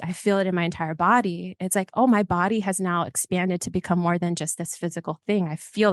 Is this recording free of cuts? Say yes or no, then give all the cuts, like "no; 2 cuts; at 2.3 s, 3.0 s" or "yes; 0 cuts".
yes; 0 cuts